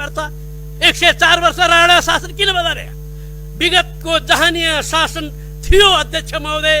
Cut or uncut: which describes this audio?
uncut